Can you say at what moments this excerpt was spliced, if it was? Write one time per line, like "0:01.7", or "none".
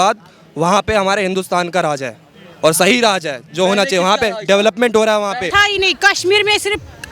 0:05.5